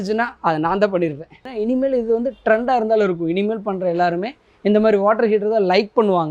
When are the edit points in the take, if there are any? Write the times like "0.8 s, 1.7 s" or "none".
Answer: 1.5 s